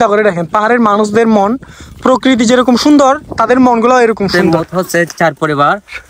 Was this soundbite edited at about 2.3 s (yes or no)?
no